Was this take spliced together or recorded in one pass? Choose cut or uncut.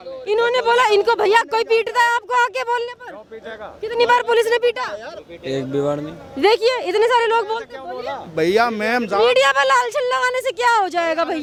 uncut